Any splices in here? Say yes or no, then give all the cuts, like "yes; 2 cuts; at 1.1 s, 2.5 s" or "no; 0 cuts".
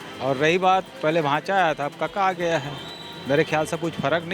no; 0 cuts